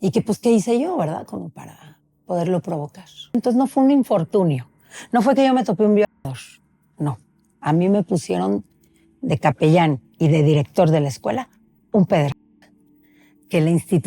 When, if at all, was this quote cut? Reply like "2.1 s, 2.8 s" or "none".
3.3 s